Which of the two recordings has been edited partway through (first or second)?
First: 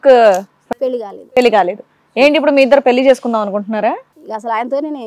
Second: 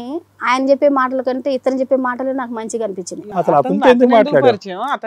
second